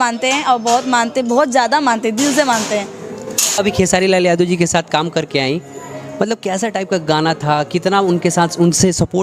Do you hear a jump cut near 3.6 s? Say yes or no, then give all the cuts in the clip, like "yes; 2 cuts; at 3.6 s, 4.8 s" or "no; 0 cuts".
yes; 1 cut; at 3.6 s